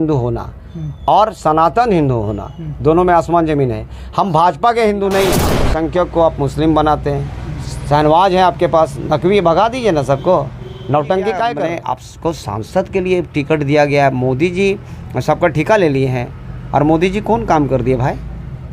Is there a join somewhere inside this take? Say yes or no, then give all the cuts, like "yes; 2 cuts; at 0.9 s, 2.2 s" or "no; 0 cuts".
yes; 2 cuts; at 5.6 s, 11.7 s